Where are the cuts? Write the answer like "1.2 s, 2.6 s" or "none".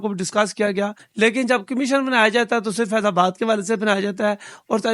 1.0 s